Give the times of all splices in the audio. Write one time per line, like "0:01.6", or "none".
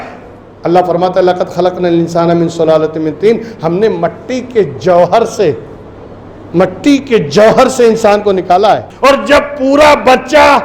0:08.9